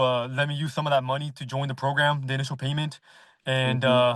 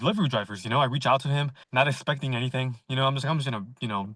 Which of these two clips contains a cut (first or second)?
second